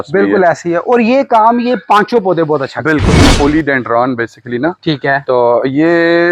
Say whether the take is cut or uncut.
cut